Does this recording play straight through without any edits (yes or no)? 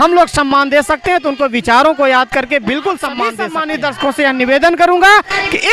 no